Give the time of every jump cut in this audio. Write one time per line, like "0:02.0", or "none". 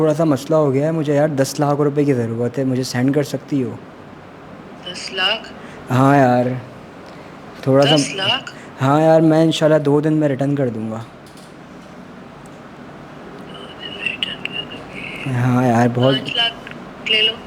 none